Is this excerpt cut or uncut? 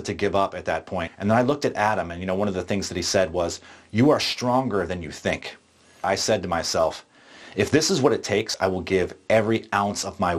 cut